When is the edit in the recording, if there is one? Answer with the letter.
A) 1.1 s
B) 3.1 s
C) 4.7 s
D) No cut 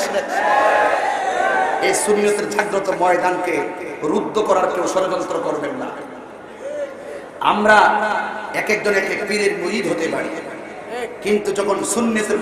A